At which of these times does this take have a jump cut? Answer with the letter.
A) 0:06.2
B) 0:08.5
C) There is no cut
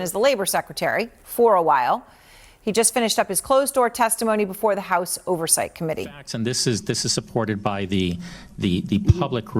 A